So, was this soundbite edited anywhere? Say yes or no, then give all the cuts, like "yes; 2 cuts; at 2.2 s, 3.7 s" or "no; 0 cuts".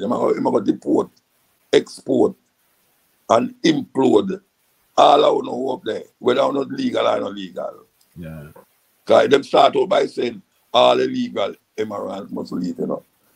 no; 0 cuts